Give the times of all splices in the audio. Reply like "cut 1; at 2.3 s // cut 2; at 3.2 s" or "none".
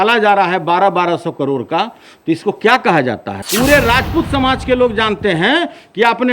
cut 1; at 3.3 s